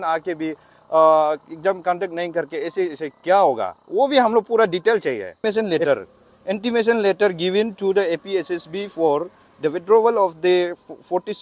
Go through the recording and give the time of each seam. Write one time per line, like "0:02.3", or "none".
0:05.4